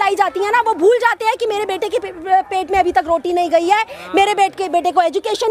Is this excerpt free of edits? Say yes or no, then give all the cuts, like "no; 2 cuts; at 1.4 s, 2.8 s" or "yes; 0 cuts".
yes; 0 cuts